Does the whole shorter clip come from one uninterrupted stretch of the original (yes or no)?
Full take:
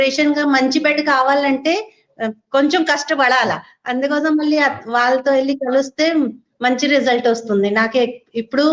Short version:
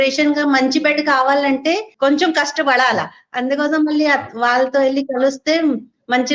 no